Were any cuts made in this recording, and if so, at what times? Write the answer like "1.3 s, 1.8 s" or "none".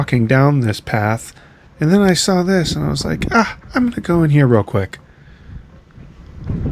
none

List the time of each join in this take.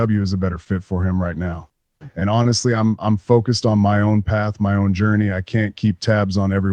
none

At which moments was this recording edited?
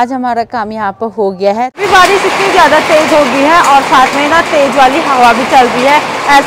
1.7 s

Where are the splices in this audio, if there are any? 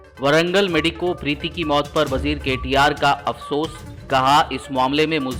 none

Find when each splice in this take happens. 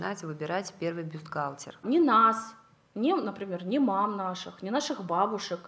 1.8 s

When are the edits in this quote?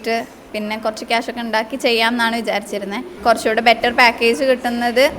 3.1 s

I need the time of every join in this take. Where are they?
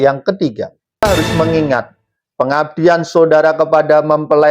1.0 s

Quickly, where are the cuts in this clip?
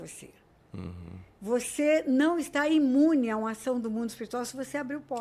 none

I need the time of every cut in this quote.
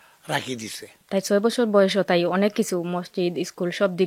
0.9 s

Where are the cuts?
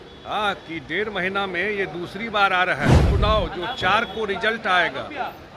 3.0 s

